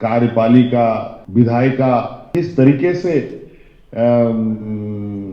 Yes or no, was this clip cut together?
yes